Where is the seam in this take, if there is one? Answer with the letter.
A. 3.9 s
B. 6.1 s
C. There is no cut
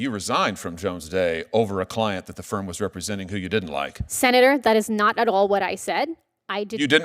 C